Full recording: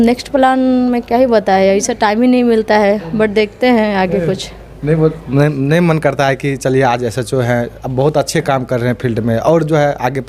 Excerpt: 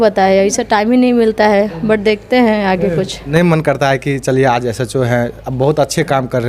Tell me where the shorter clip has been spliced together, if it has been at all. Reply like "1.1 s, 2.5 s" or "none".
3.2 s